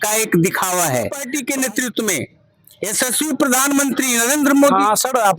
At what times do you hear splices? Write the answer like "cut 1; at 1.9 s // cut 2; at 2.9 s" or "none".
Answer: cut 1; at 1.3 s